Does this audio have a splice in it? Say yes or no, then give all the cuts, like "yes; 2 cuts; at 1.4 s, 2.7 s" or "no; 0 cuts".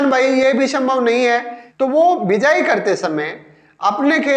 yes; 1 cut; at 1.6 s